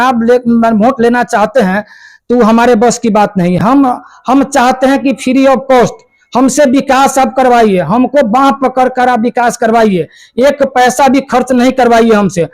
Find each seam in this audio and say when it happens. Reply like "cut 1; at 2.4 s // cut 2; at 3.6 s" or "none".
none